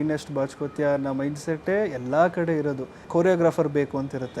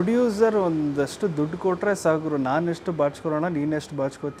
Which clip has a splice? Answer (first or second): first